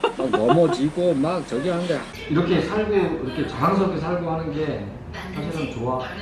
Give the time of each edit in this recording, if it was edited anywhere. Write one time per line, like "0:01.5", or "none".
0:02.1